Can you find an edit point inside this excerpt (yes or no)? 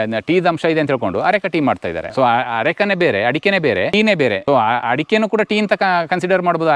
yes